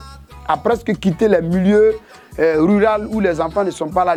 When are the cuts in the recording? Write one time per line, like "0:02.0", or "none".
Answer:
none